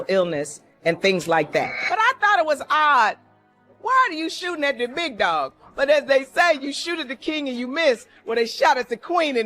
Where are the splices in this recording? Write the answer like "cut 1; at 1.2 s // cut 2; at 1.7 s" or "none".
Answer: cut 1; at 8.1 s